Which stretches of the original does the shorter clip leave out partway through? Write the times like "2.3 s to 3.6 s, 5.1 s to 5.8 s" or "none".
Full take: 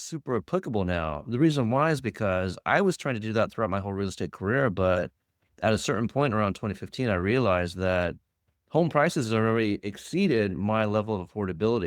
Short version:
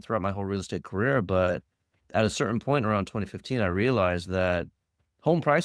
none